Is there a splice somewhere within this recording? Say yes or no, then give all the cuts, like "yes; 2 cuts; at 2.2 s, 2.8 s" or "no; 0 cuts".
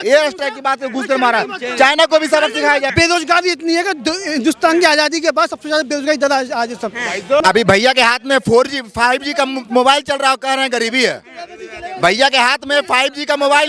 yes; 2 cuts; at 2.9 s, 7.4 s